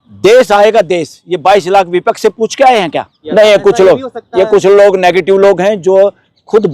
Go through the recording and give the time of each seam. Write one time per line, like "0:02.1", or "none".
0:03.2